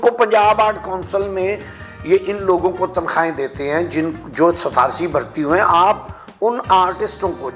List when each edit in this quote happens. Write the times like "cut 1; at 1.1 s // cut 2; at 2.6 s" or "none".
none